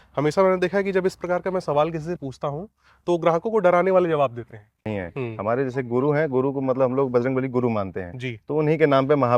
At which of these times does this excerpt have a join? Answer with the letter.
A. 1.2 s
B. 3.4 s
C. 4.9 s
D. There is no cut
C